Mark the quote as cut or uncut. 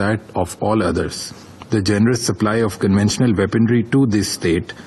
uncut